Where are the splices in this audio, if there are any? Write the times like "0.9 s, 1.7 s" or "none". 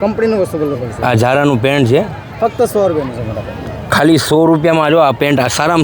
none